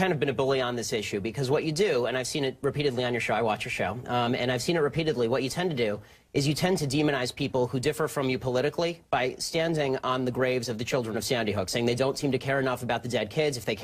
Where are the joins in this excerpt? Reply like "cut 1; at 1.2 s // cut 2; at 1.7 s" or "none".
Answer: cut 1; at 8.8 s